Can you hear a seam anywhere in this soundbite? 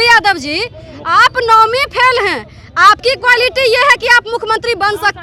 no; 0 cuts

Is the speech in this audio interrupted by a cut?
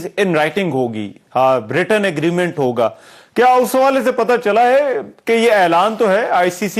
no; 0 cuts

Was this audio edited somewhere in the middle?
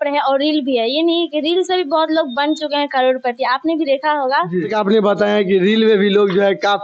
yes; 1 cut; at 4.7 s

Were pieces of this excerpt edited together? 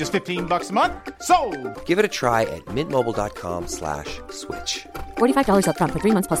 no; 0 cuts

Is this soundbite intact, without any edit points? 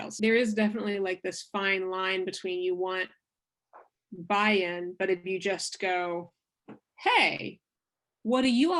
yes; 0 cuts

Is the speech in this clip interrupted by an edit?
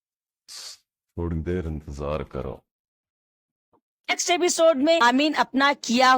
yes; 2 cuts; at 4.2 s, 5.0 s

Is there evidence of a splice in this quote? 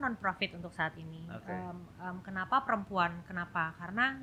no; 0 cuts

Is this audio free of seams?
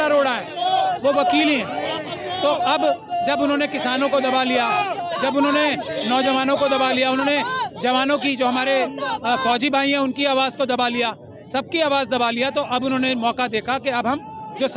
yes; 0 cuts

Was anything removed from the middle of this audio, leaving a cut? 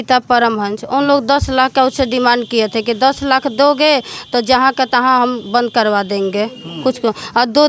no; 0 cuts

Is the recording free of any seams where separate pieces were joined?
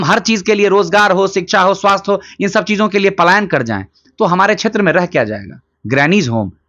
yes; 0 cuts

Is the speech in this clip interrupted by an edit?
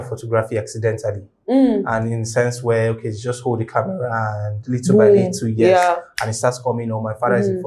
no; 0 cuts

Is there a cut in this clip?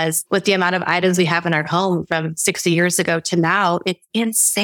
no; 0 cuts

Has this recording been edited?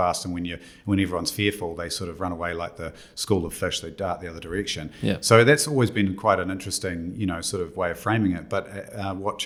no; 0 cuts

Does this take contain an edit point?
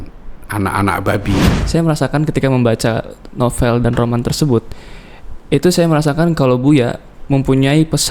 yes; 1 cut; at 1.6 s

